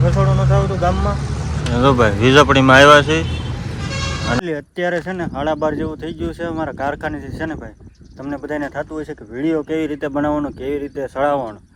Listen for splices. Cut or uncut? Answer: cut